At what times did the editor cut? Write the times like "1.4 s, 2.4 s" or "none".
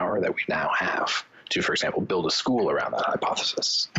none